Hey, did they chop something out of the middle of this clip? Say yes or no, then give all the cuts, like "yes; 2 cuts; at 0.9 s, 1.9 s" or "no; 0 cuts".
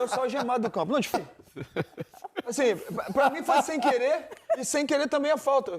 yes; 1 cut; at 1.1 s